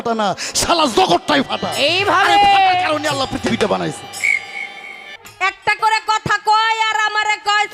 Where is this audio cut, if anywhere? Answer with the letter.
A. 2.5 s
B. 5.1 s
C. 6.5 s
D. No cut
B